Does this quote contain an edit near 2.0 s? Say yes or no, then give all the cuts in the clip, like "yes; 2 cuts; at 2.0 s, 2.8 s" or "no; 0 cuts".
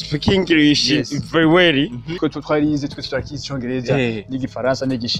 yes; 1 cut; at 2.0 s